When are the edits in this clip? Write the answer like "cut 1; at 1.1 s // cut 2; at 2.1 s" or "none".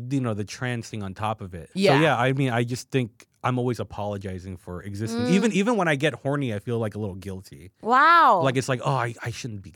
cut 1; at 1.9 s